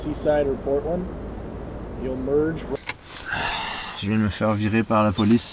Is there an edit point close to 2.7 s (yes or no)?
yes